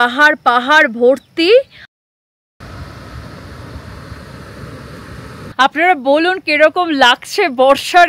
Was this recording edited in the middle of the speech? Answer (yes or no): yes